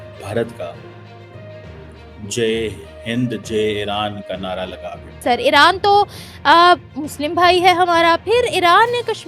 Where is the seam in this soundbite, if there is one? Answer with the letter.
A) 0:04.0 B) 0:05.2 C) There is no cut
B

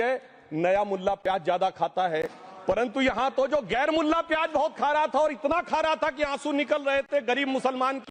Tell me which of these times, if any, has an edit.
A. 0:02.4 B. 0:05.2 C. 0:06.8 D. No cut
D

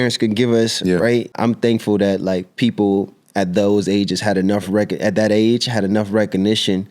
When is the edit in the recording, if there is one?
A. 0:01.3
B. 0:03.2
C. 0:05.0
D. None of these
A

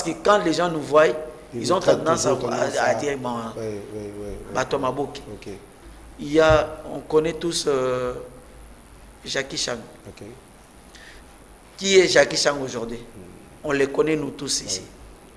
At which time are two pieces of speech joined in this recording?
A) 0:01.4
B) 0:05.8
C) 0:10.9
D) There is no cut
B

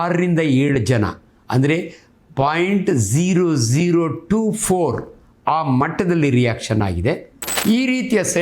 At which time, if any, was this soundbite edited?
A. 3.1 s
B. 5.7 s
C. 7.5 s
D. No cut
C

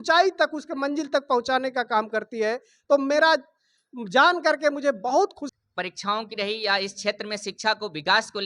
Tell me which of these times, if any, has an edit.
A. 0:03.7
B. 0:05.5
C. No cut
B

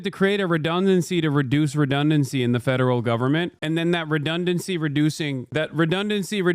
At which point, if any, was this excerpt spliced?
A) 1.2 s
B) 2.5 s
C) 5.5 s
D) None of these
C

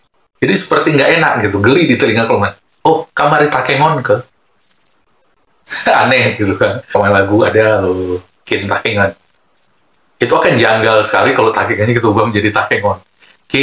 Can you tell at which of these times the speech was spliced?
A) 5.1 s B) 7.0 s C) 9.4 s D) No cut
B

